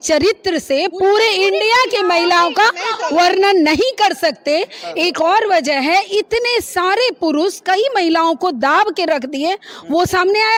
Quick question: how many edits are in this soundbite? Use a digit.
0